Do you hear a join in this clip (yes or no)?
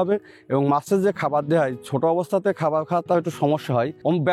no